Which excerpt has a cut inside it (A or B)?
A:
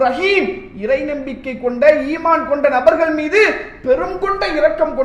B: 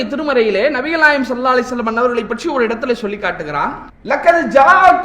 B